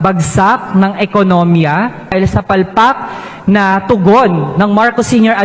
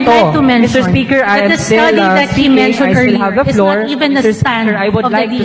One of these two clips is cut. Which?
first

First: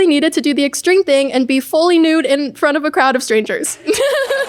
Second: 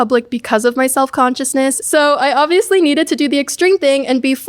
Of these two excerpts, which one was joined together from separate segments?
second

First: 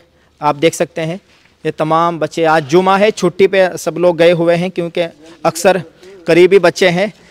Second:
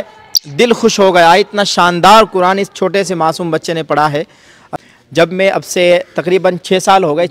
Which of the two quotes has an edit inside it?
second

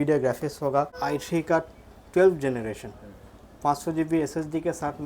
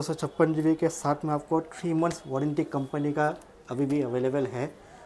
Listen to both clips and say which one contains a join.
first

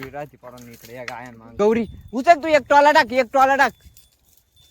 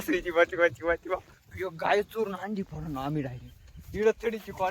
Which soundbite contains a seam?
first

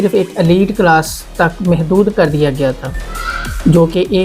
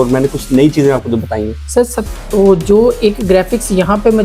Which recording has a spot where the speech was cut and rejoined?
second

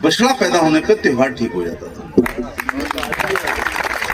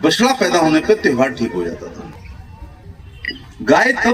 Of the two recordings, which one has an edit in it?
second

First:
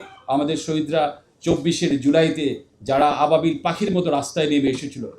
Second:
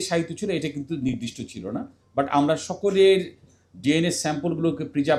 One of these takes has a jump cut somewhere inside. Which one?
first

